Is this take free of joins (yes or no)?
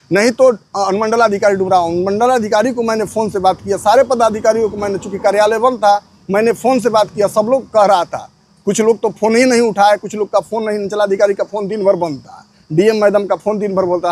yes